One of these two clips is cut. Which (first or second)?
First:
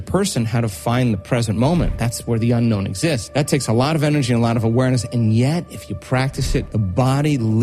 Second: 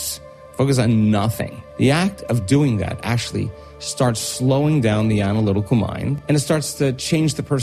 second